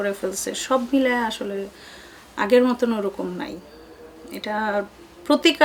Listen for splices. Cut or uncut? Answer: uncut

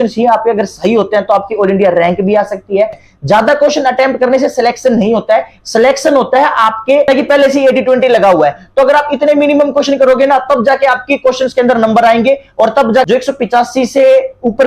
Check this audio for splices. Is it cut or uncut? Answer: cut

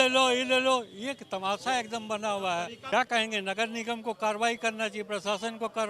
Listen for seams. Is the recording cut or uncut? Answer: cut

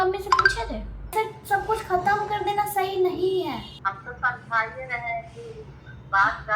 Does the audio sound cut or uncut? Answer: cut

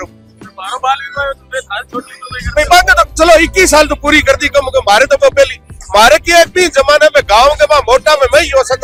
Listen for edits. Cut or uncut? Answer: uncut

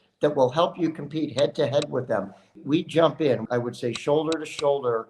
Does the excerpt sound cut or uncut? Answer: cut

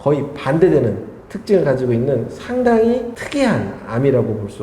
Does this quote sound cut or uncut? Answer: cut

